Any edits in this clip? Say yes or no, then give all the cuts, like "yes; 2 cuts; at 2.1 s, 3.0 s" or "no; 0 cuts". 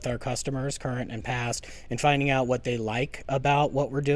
no; 0 cuts